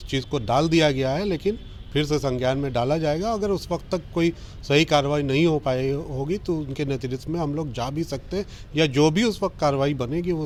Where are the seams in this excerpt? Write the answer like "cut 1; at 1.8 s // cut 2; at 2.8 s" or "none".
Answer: none